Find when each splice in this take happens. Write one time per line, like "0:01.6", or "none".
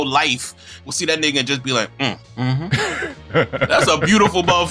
0:02.5
0:03.7